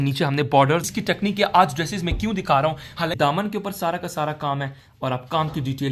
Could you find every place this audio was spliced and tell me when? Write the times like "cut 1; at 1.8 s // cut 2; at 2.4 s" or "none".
cut 1; at 0.8 s // cut 2; at 3.1 s